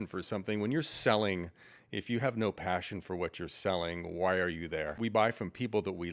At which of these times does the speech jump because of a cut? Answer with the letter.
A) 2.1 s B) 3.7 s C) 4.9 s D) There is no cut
C